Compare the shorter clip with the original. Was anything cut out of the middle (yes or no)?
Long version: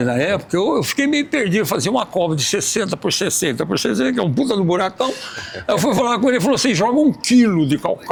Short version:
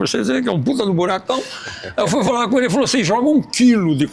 no